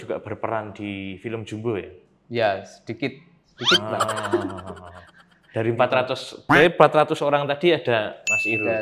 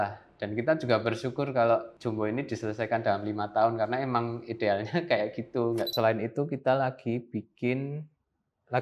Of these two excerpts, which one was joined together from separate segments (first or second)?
second